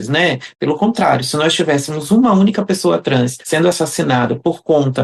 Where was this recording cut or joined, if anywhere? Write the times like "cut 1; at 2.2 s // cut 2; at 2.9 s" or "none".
none

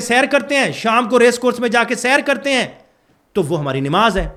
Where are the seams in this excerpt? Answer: none

